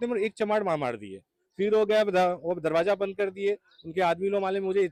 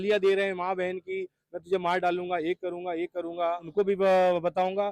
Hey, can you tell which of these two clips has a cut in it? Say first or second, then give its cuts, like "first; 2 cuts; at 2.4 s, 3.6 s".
second; 1 cut; at 3.7 s